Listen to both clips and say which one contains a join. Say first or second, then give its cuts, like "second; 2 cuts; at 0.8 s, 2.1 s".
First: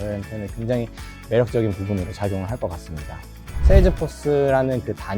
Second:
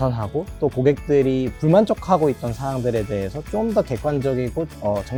first; 1 cut; at 3.5 s